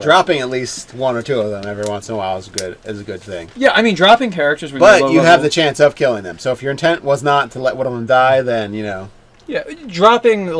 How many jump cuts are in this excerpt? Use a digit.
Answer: 1